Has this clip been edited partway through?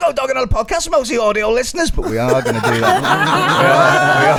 no; 0 cuts

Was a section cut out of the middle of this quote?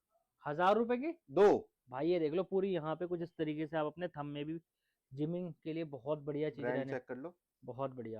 no; 0 cuts

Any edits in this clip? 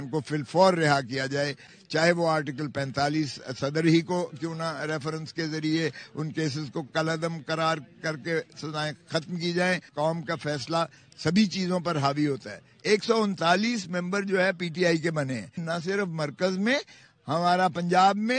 no; 0 cuts

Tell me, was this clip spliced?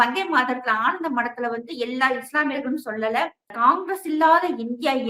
yes; 1 cut; at 3.5 s

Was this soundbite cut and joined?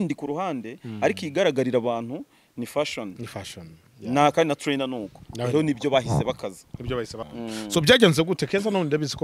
yes; 1 cut; at 7.3 s

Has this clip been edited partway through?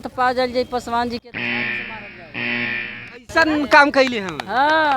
yes; 2 cuts; at 1.2 s, 3.2 s

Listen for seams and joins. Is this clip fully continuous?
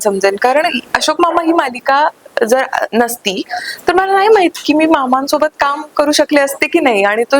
yes; 0 cuts

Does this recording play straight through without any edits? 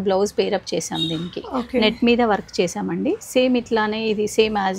yes; 0 cuts

